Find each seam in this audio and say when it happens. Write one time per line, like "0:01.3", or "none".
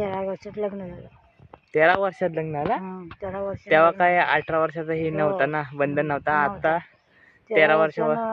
none